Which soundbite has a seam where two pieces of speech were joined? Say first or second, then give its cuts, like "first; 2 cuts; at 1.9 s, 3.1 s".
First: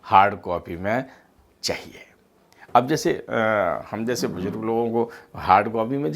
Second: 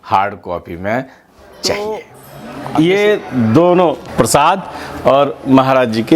second; 2 cuts; at 1.7 s, 4.0 s